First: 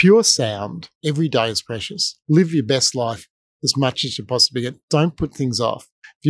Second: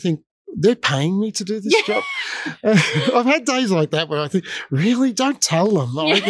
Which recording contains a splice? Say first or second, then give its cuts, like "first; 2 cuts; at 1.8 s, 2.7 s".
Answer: first; 1 cut; at 0.9 s